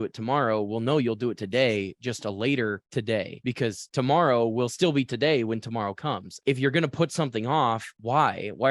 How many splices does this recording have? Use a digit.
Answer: 0